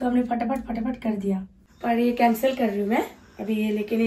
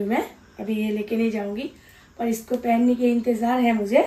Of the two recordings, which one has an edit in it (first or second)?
first